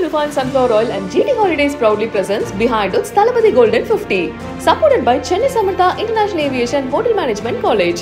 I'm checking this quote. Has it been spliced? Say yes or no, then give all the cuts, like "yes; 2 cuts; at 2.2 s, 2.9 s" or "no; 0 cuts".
no; 0 cuts